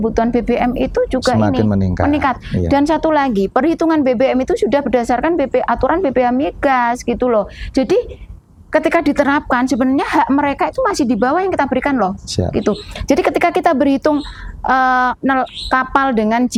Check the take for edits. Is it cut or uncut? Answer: uncut